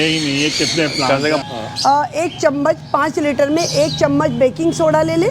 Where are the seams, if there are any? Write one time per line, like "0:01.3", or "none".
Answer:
0:01.4